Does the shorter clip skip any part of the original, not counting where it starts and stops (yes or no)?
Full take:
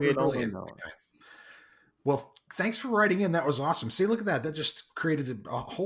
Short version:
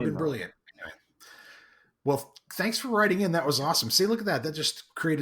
no